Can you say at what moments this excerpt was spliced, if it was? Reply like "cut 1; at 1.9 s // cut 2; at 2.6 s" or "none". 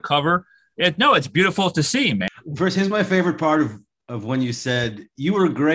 cut 1; at 2.3 s